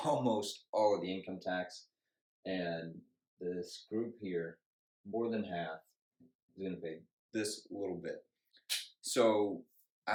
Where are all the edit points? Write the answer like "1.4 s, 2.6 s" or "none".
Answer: none